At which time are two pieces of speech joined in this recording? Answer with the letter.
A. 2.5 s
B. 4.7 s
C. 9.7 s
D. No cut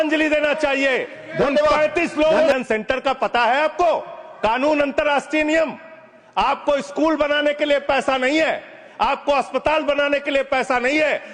A